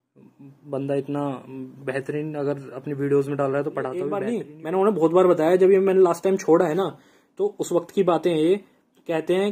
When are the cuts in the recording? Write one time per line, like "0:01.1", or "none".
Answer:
0:04.2